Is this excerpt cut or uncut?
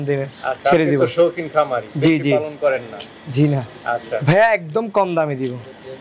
cut